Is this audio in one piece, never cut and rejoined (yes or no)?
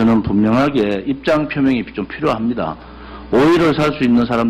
yes